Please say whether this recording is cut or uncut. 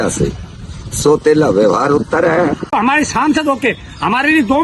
cut